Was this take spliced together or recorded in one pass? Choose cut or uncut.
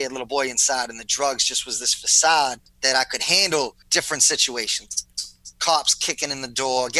cut